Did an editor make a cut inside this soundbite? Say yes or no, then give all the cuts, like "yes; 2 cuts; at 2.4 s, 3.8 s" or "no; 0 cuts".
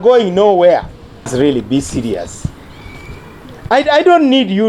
yes; 1 cut; at 1.3 s